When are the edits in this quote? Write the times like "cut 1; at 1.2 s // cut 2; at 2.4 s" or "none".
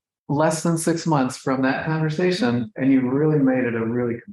cut 1; at 2.7 s